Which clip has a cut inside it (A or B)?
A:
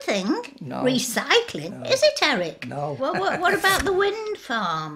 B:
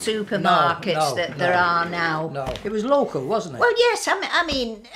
B